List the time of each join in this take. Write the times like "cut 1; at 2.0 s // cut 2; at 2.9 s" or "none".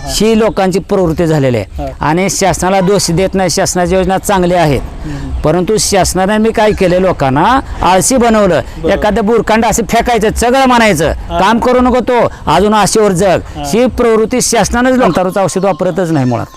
cut 1; at 15.1 s